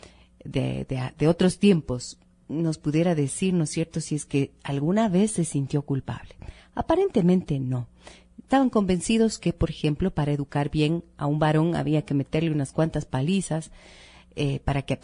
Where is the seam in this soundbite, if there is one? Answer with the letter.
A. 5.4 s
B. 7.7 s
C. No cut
B